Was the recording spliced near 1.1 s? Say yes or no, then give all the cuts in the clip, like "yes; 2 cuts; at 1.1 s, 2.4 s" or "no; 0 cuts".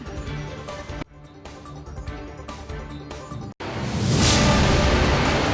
no; 1 cut; at 3.6 s